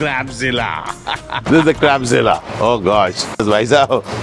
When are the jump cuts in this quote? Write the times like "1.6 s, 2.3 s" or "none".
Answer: 1.3 s, 3.4 s

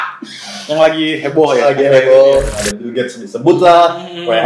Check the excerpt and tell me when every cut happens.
2.5 s

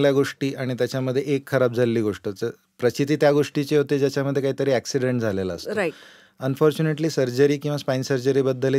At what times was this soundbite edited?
none

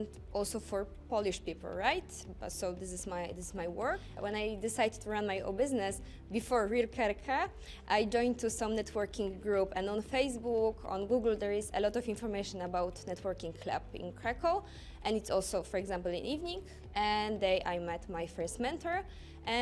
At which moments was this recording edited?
4.1 s

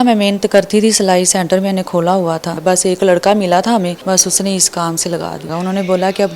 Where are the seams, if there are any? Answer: 2.5 s, 4.0 s, 5.5 s

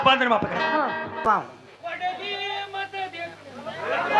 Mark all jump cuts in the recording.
1.2 s

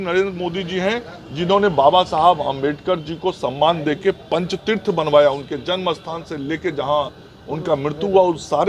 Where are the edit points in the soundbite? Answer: none

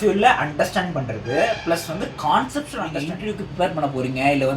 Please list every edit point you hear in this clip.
2.8 s

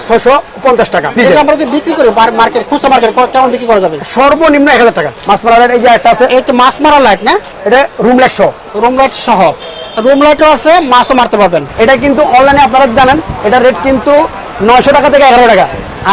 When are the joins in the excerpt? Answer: 1.2 s, 5.1 s, 7.5 s, 11.7 s

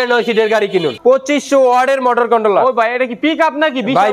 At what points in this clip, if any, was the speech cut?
0.9 s

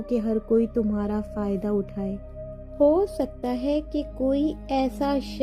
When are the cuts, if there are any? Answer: 2.2 s

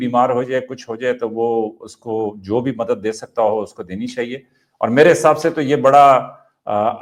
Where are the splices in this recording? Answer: none

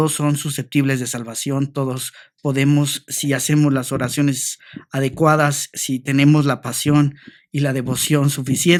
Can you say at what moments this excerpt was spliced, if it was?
none

